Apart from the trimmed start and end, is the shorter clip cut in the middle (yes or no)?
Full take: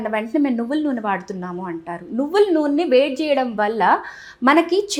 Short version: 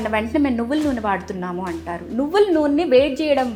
no